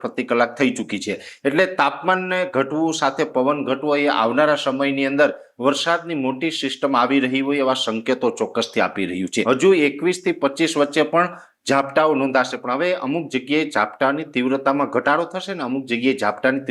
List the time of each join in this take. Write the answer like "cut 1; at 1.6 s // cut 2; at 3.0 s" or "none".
cut 1; at 9.4 s